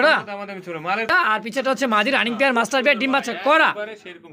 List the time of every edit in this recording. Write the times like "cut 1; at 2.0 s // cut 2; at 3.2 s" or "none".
cut 1; at 1.1 s